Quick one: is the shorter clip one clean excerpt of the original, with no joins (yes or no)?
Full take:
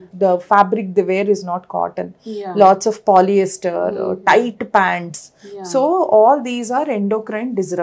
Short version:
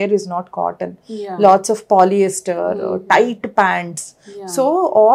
yes